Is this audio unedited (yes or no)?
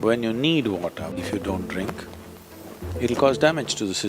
no